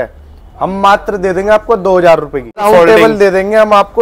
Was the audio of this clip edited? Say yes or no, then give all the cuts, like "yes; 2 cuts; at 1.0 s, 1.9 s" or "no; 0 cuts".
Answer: yes; 1 cut; at 2.6 s